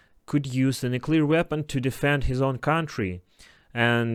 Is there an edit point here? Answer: no; 0 cuts

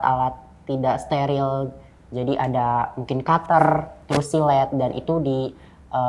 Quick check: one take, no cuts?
yes; 0 cuts

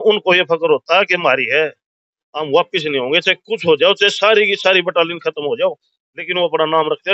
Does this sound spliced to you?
no; 0 cuts

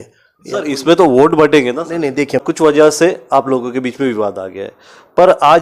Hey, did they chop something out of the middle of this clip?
yes; 1 cut; at 2.4 s

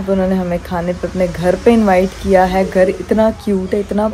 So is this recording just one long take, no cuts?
yes; 0 cuts

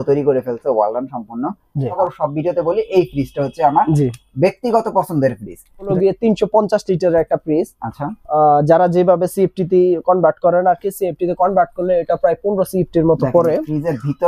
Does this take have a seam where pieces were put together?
yes; 2 cuts; at 2.0 s, 5.9 s

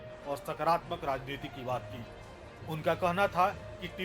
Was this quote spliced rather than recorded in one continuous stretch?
no; 0 cuts

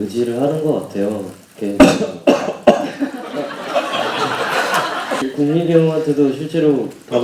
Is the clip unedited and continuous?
yes; 0 cuts

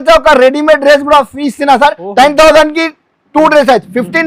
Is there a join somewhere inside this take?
no; 0 cuts

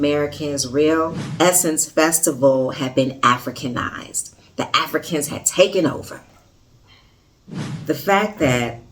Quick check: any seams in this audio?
yes; 2 cuts; at 1.2 s, 7.6 s

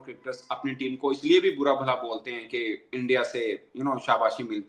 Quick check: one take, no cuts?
yes; 0 cuts

